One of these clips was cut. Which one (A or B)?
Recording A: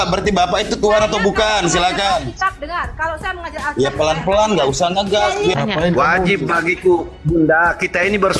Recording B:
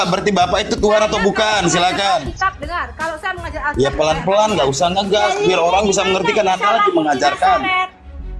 A